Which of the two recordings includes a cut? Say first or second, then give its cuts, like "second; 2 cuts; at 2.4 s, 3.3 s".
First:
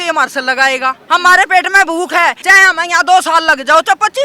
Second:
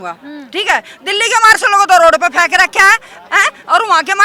first; 2 cuts; at 1.0 s, 2.4 s